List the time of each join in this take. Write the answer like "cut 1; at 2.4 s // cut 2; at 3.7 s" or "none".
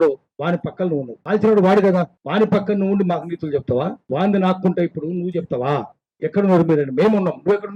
cut 1; at 1.1 s // cut 2; at 2.2 s // cut 3; at 4.0 s